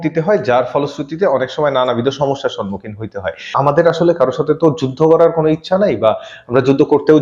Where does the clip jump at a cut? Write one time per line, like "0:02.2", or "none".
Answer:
0:03.5

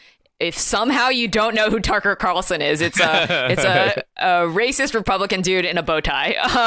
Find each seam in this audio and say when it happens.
none

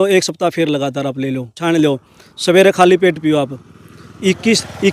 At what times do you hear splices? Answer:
0:01.6

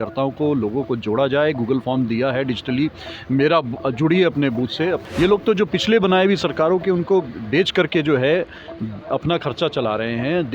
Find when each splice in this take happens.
0:05.0

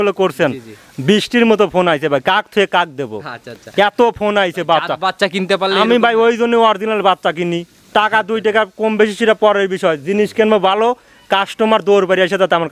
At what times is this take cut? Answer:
none

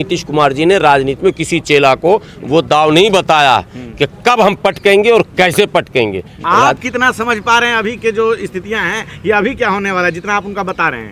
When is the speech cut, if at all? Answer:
0:06.3

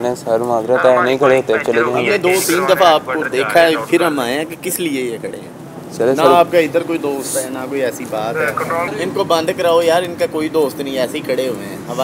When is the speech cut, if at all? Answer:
0:08.9

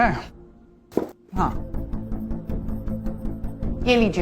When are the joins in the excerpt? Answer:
none

